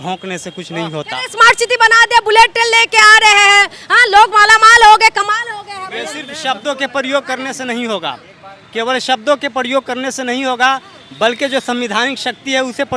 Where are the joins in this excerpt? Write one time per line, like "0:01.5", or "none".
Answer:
none